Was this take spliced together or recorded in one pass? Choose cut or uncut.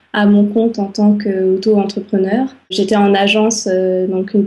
cut